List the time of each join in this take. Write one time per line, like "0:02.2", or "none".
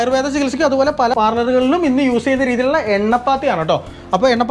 0:01.1